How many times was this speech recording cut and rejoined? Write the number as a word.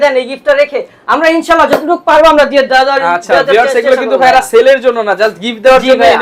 zero